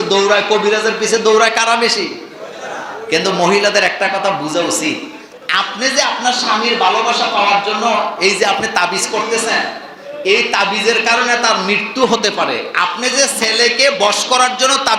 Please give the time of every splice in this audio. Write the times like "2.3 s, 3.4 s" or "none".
none